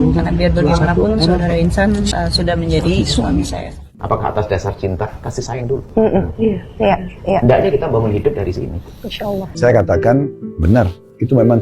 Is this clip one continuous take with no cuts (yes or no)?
no